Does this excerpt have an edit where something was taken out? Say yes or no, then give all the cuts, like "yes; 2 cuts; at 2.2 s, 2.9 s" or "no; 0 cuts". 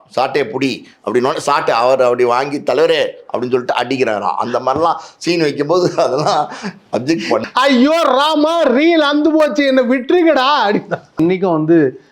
yes; 2 cuts; at 7.4 s, 11.2 s